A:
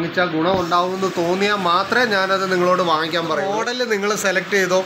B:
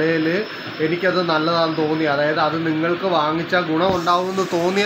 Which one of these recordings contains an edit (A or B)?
A